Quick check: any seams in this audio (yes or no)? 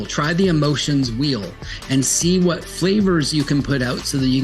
no